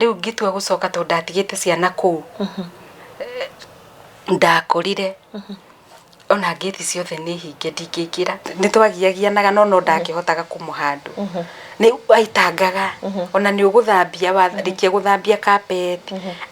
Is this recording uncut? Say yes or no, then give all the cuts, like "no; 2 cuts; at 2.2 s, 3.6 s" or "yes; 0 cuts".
no; 1 cut; at 8.5 s